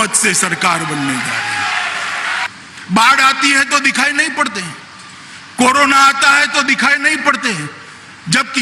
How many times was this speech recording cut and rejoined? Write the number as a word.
one